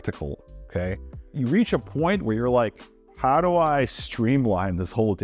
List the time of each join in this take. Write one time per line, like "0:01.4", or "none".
0:01.3